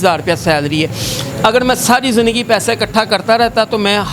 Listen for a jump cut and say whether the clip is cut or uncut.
uncut